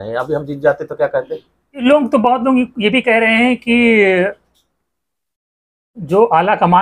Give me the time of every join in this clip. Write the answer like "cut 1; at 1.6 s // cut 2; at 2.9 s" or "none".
cut 1; at 1.7 s